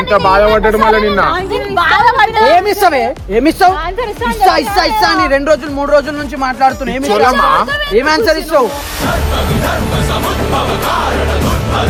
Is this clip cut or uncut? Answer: uncut